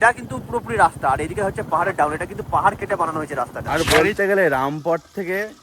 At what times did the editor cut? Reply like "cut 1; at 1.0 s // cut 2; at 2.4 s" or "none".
cut 1; at 3.6 s